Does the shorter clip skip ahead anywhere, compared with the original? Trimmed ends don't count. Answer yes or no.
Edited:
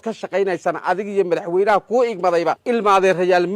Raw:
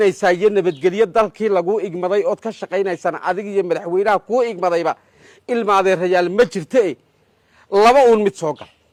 yes